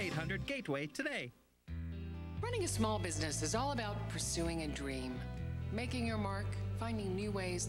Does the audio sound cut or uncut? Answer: cut